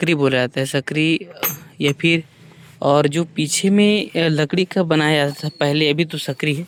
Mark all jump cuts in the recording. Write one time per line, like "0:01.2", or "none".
none